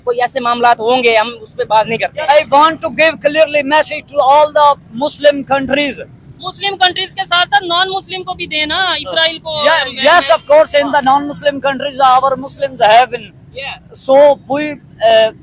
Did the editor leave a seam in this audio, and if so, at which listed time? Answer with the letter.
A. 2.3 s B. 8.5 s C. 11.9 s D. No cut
A